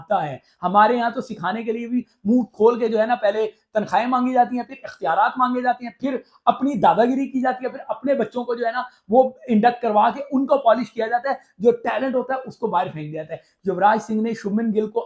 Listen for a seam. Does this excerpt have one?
no; 0 cuts

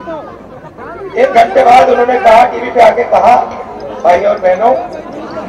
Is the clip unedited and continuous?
yes; 0 cuts

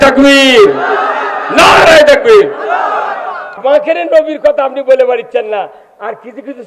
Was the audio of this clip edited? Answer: yes; 1 cut; at 3.5 s

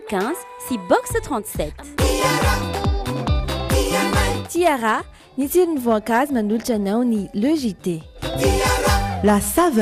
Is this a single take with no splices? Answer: yes; 0 cuts

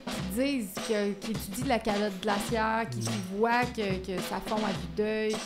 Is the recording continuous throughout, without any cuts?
yes; 0 cuts

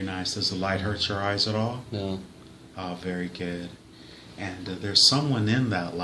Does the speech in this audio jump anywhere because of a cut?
yes; 1 cut; at 0.9 s

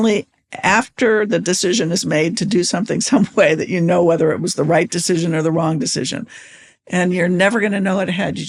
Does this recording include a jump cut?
no; 0 cuts

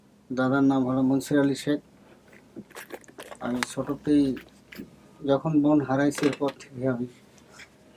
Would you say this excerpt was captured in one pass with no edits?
yes; 0 cuts

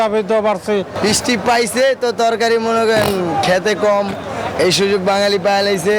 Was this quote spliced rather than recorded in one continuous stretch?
yes; 1 cut; at 0.9 s

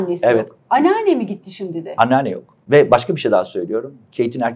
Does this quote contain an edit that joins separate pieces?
yes; 1 cut; at 2.5 s

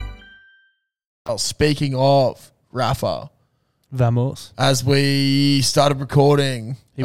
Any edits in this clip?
no; 0 cuts

